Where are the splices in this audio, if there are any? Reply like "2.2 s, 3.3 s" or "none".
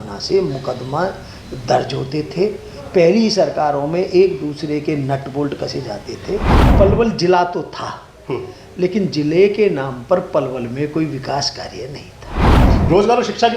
6.6 s, 12.6 s